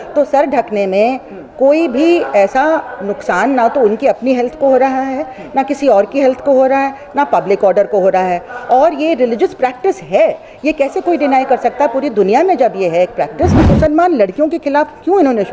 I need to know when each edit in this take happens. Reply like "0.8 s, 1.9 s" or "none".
13.6 s